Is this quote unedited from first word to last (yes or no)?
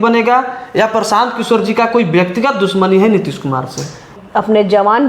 no